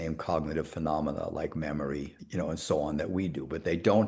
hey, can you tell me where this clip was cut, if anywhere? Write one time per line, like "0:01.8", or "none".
0:02.2